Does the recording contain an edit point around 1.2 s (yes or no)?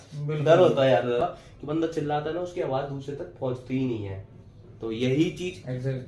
yes